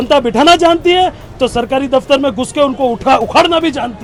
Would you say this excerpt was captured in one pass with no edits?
yes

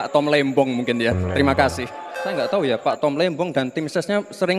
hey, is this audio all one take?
no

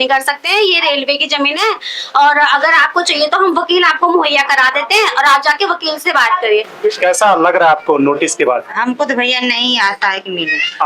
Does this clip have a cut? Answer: yes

